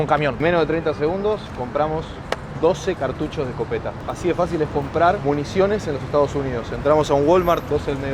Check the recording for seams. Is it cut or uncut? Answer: uncut